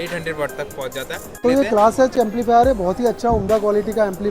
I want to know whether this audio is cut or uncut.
cut